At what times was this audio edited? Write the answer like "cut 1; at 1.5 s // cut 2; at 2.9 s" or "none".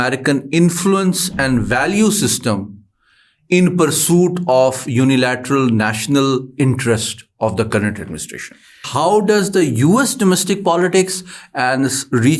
cut 1; at 8.8 s